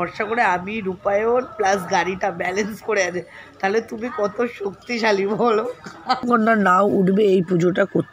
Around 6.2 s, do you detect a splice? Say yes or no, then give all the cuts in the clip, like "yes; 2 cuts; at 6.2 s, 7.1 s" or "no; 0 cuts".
yes; 1 cut; at 6.2 s